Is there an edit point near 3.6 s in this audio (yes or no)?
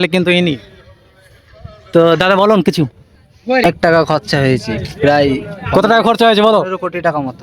yes